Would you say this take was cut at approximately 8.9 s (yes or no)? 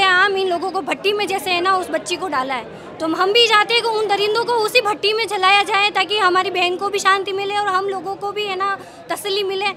no